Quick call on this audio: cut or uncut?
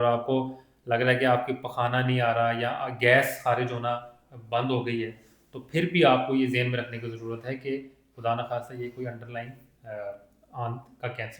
uncut